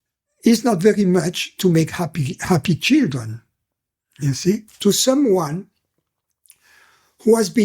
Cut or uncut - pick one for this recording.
cut